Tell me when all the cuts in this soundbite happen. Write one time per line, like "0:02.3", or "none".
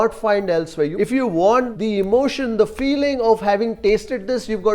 0:00.9